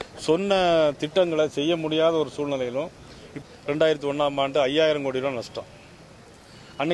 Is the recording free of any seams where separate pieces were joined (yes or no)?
no